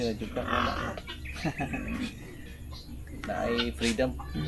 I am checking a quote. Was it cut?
no; 0 cuts

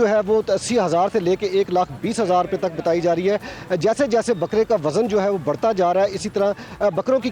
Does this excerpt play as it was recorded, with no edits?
yes; 0 cuts

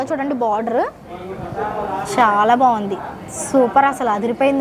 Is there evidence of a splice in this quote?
no; 0 cuts

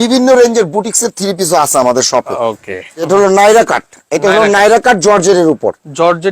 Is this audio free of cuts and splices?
no; 1 cut; at 3.0 s

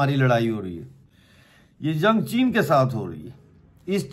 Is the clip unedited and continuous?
yes; 0 cuts

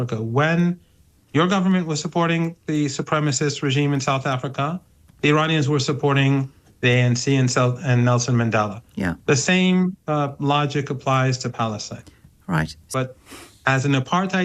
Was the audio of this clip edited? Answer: yes; 1 cut; at 12.9 s

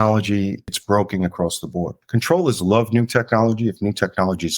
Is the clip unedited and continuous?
no; 2 cuts; at 0.7 s, 2.0 s

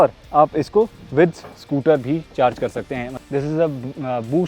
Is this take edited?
yes; 1 cut; at 3.1 s

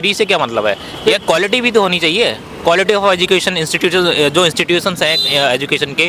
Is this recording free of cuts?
yes; 0 cuts

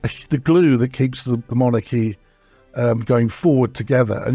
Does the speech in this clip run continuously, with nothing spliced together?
yes; 0 cuts

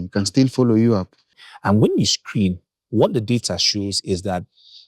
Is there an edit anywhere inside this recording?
yes; 1 cut; at 1.4 s

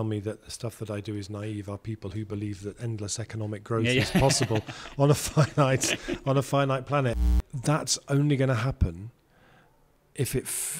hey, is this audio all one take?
no; 1 cut; at 7.2 s

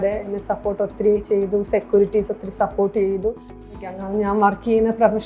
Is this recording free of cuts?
no; 1 cut; at 3.9 s

